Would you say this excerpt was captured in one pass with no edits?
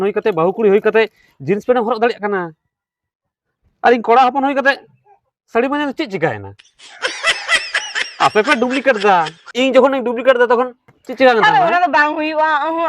no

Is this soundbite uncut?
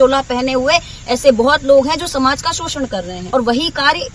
no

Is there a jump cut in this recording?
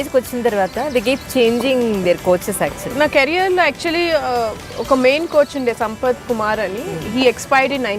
yes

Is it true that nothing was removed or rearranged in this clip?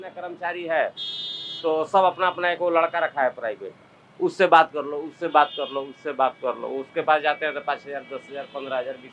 yes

